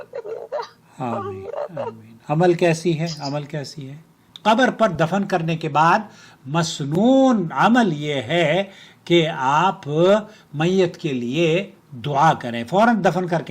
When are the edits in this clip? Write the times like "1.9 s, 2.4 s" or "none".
4.2 s